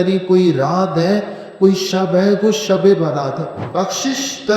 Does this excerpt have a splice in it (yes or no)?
yes